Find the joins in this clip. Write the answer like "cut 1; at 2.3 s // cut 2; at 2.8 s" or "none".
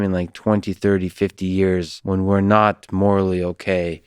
cut 1; at 1.9 s